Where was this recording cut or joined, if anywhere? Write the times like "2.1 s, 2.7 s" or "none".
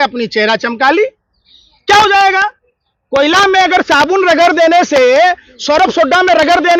none